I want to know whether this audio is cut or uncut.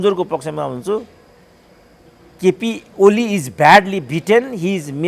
uncut